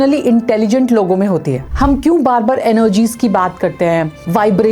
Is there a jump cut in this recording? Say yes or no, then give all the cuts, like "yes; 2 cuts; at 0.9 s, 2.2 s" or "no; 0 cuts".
yes; 1 cut; at 1.6 s